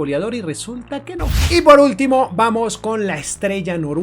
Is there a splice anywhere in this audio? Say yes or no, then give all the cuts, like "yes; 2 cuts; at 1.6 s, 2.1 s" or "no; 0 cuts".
yes; 1 cut; at 1.4 s